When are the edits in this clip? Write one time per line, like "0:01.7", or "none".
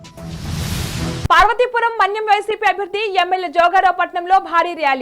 0:01.2